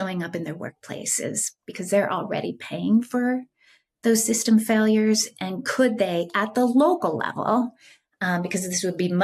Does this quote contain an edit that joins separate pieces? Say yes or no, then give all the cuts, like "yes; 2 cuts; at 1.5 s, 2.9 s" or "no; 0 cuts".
no; 0 cuts